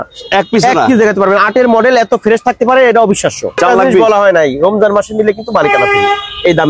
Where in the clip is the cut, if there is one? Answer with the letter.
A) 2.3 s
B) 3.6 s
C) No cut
B